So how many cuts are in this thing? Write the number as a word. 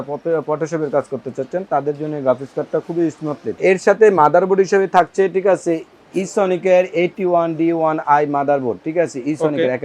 one